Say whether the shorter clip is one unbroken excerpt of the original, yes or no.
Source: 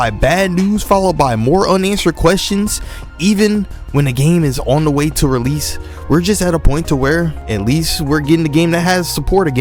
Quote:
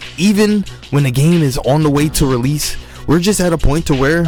yes